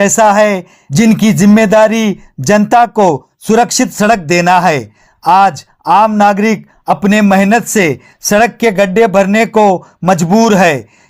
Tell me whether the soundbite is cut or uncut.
uncut